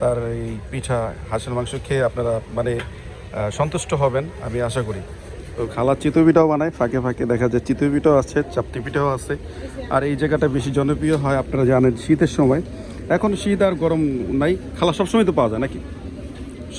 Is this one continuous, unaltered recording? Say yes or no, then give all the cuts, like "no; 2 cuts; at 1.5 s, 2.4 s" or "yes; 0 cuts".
yes; 0 cuts